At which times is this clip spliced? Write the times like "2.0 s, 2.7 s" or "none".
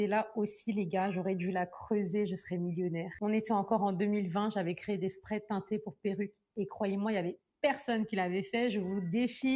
none